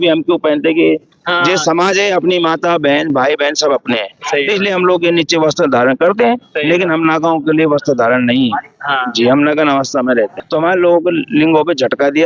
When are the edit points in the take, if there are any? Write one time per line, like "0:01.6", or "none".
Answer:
0:10.4